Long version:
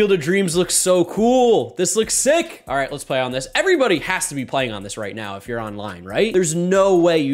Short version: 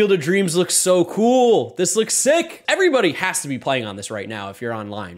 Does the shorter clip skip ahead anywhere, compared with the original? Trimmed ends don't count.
yes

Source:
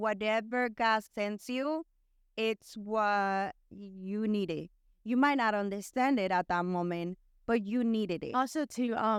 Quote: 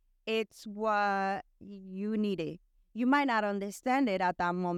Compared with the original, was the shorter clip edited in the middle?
no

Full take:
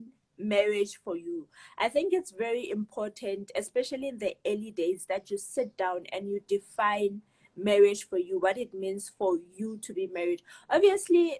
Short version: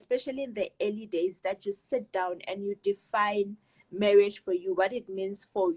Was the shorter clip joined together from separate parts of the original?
no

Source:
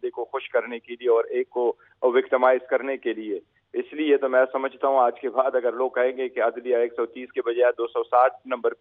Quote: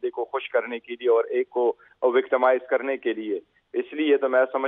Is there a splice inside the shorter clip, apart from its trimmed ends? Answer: no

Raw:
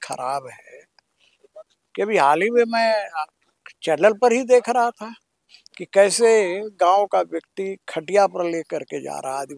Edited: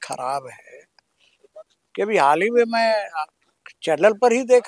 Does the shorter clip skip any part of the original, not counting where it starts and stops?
no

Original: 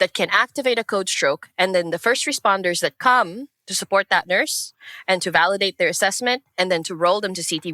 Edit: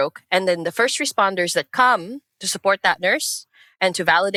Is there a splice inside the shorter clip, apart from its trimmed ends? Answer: no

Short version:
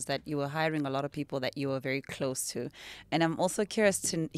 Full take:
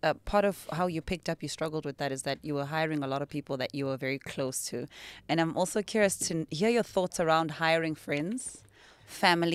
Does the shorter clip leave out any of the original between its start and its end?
no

